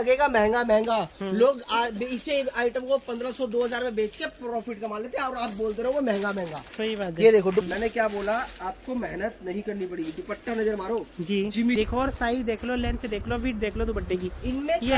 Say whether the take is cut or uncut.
cut